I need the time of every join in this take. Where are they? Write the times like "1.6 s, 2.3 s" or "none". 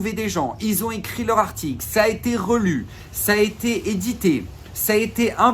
none